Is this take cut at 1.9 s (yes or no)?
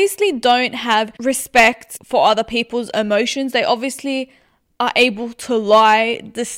yes